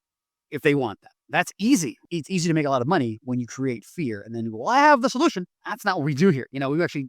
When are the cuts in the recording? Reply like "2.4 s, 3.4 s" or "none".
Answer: 2.0 s